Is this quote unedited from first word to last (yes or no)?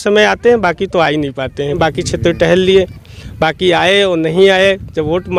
no